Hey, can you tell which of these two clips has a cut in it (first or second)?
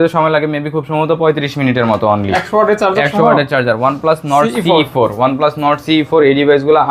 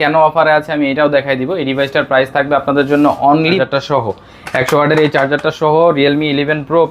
second